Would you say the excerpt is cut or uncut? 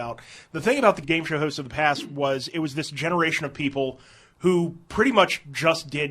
cut